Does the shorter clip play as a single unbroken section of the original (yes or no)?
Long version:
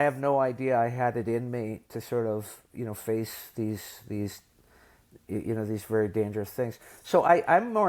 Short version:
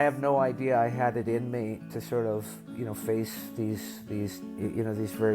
no